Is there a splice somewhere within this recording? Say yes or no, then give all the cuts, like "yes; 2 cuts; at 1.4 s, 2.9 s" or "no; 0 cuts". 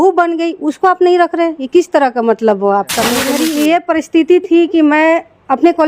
yes; 1 cut; at 3.3 s